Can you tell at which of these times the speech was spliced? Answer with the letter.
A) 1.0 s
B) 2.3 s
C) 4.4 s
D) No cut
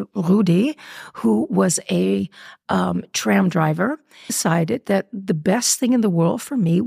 C